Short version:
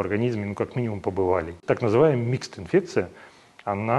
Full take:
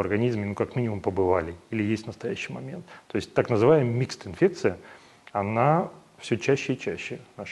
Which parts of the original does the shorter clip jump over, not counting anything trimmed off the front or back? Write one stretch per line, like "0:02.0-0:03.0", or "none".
0:01.6-0:03.3